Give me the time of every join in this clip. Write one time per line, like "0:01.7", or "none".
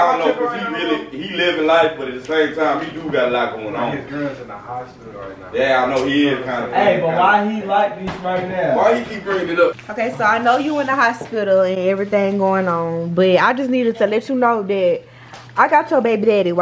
0:09.8